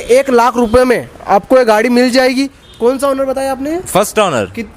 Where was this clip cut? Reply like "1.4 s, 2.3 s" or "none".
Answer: none